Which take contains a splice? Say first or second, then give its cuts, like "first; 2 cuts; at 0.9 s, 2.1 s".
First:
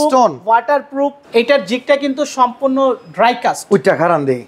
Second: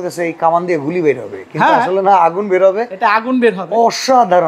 first; 1 cut; at 1.2 s